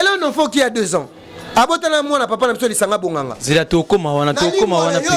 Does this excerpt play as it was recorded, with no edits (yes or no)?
yes